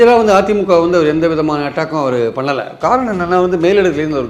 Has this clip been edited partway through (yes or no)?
no